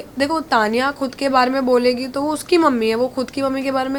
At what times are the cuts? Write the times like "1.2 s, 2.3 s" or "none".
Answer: none